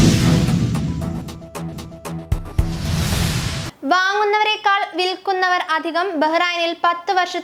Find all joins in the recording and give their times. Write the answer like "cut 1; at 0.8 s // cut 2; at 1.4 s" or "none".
none